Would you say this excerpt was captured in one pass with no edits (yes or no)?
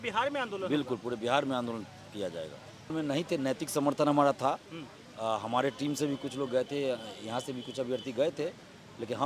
no